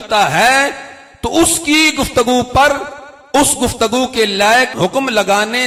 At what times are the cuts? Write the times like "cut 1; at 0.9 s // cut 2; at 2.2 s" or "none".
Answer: none